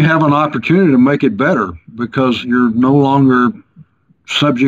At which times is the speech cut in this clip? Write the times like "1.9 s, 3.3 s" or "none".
2.4 s